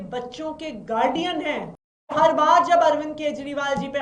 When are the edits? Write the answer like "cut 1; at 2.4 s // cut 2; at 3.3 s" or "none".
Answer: cut 1; at 2.1 s